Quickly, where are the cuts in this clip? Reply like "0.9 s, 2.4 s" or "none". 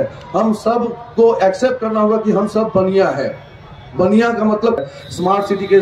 4.8 s

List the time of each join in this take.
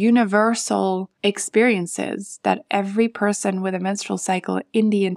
1.1 s

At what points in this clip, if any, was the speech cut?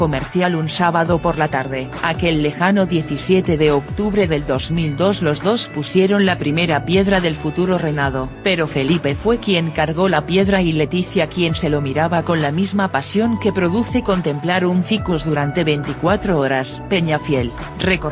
none

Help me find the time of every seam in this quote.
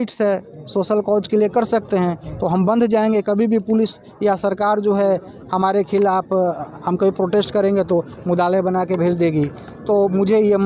none

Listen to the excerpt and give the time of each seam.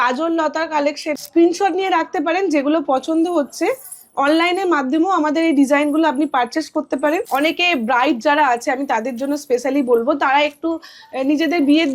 1.2 s, 7.3 s

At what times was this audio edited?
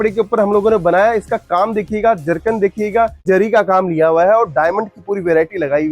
3.2 s

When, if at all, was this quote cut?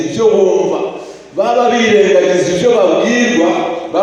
none

